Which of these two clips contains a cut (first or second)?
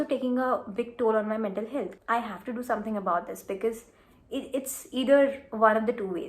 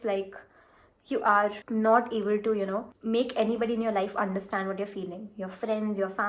first